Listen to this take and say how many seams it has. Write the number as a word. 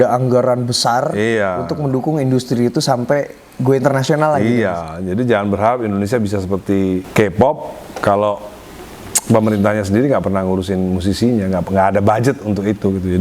one